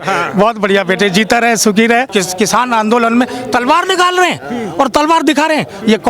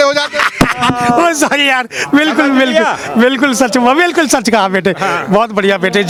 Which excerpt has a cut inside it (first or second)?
first